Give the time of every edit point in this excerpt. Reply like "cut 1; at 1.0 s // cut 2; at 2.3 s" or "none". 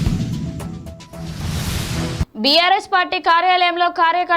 cut 1; at 2.2 s